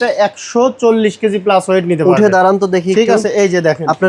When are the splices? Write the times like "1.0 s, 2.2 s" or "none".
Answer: none